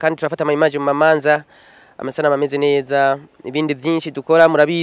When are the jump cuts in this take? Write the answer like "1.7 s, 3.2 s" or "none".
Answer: none